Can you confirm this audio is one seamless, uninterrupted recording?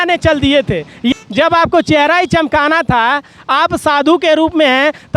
no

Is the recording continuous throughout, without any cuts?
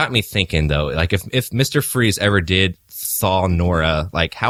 yes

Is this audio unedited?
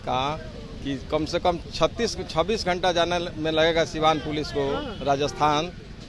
yes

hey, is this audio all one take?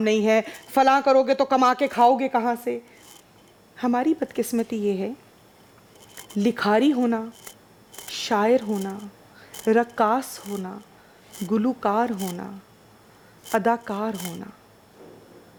yes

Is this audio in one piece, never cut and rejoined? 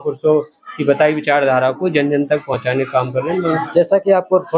yes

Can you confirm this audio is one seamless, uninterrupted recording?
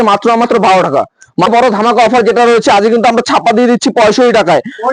no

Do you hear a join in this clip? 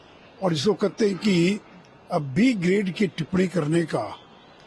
no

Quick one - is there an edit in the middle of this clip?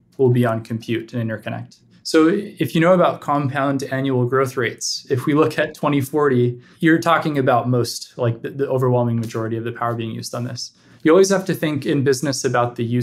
no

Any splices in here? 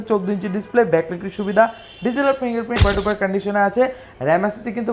yes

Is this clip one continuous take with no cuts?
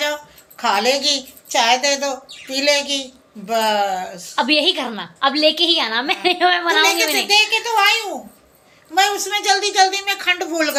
yes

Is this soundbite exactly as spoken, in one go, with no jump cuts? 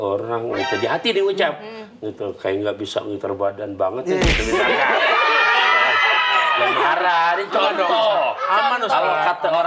yes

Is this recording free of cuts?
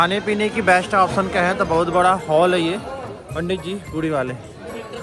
yes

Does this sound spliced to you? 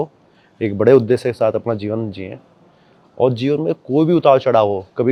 no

